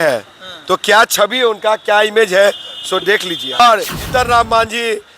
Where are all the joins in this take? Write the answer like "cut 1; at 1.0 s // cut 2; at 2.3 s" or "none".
cut 1; at 3.6 s